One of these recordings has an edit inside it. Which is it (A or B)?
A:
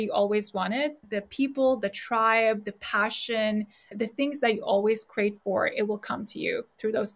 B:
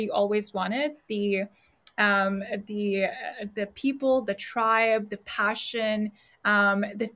A